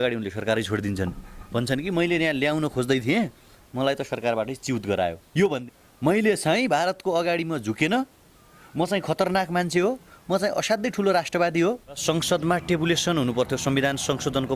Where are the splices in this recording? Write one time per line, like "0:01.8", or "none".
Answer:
0:05.6
0:12.0